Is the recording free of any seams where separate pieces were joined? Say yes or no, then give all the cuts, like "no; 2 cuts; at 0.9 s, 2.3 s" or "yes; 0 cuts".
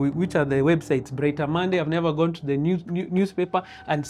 yes; 0 cuts